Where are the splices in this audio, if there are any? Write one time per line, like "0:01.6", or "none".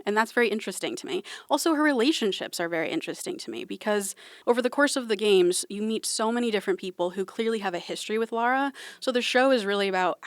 0:04.2